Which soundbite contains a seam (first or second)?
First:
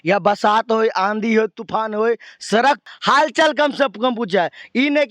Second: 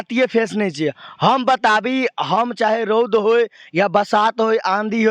first